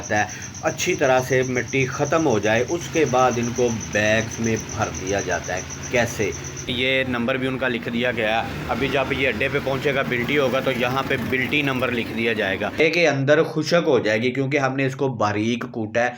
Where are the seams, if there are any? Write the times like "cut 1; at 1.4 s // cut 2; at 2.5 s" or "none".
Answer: cut 1; at 6.7 s // cut 2; at 12.8 s